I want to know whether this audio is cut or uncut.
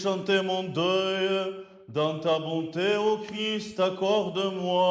uncut